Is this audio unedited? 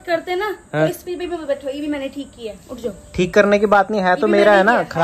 yes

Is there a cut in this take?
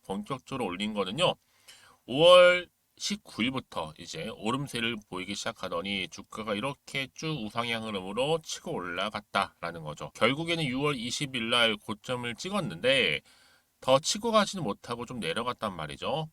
yes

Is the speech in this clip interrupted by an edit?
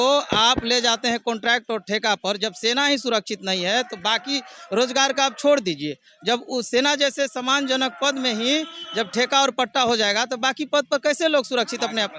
no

